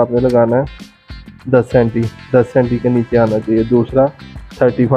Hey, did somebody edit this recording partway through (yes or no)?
no